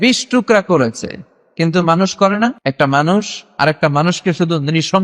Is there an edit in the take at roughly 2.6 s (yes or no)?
yes